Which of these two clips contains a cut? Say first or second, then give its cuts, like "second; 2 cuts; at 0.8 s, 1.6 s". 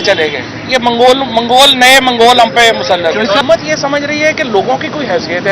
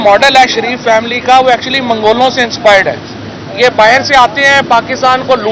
first; 1 cut; at 3.4 s